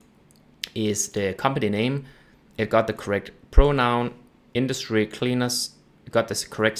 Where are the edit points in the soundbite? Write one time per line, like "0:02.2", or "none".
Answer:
none

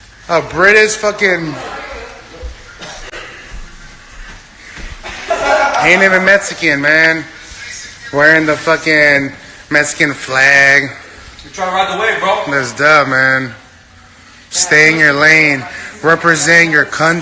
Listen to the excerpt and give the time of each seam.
0:02.9
0:16.2

